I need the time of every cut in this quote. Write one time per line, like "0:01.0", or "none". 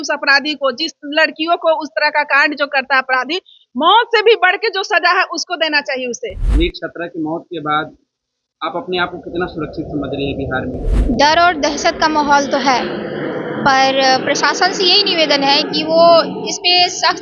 0:06.4
0:10.9